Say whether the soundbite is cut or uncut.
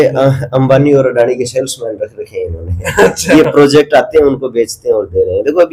uncut